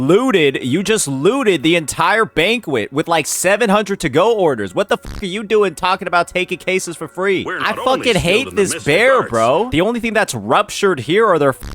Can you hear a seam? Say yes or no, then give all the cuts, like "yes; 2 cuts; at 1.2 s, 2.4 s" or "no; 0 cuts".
yes; 1 cut; at 9.7 s